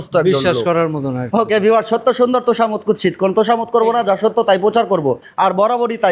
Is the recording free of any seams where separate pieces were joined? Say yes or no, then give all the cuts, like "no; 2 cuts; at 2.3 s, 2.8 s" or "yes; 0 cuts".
yes; 0 cuts